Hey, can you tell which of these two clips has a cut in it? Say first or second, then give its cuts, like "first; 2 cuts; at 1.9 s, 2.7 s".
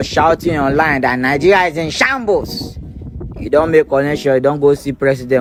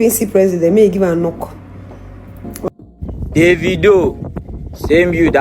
second; 1 cut; at 2.7 s